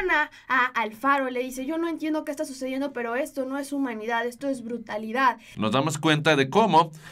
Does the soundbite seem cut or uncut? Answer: cut